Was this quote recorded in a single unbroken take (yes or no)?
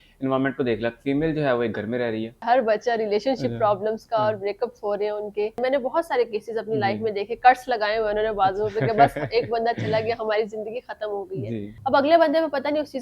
no